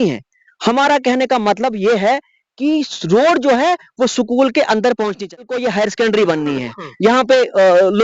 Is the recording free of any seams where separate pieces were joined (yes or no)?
no